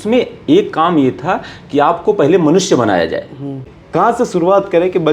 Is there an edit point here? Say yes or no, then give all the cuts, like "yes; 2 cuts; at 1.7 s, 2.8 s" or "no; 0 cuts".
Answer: yes; 1 cut; at 3.7 s